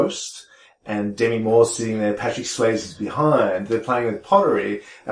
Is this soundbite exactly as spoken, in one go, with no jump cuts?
yes; 0 cuts

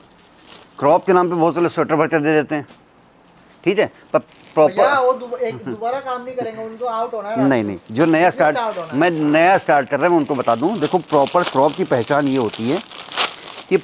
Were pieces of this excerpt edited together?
no; 0 cuts

